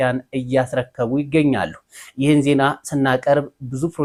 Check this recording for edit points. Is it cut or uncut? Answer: uncut